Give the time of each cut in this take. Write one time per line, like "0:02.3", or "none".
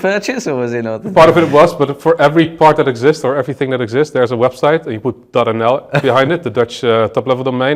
none